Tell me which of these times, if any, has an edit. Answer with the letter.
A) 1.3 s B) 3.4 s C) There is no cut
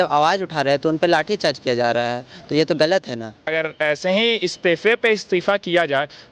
B